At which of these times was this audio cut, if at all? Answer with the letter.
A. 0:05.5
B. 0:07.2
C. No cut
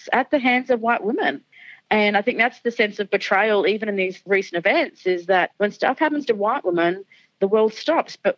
A